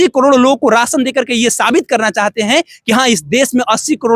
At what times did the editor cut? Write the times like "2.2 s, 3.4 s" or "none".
none